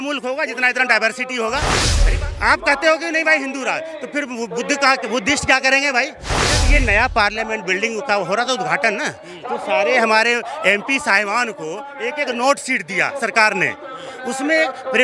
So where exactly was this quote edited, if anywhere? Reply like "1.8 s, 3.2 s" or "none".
1.9 s, 6.6 s

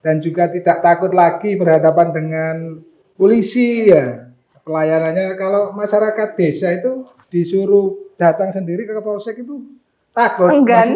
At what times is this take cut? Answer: 7.1 s, 8.1 s

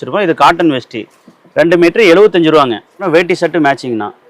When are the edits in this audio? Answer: 3.0 s

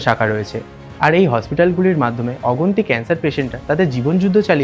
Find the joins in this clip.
none

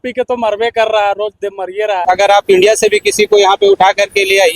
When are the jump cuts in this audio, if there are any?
2.0 s

